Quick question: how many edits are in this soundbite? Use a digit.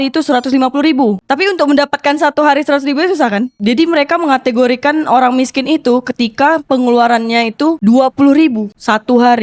3